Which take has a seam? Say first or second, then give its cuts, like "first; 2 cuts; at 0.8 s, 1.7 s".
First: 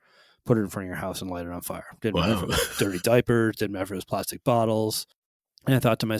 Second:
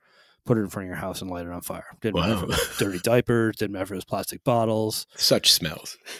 first; 1 cut; at 5.1 s